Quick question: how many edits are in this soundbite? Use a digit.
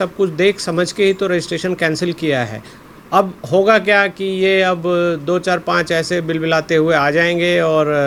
0